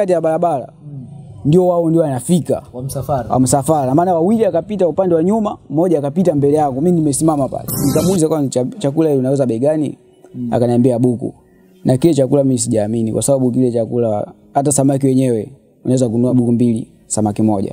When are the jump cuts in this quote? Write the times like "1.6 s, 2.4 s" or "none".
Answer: 7.9 s, 16.3 s